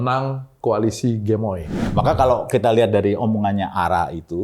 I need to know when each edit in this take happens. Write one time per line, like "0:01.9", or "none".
0:01.8